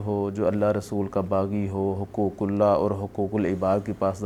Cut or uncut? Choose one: uncut